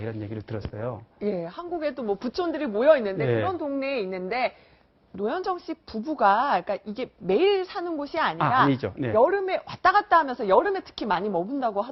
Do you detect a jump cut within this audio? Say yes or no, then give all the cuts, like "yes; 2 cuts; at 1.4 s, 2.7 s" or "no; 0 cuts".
no; 0 cuts